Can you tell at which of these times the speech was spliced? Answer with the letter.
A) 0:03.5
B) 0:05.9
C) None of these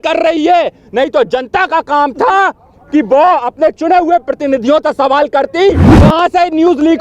B